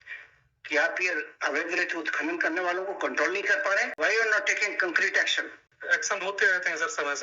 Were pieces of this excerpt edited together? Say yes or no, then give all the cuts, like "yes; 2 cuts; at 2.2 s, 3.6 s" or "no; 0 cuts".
yes; 2 cuts; at 3.9 s, 5.7 s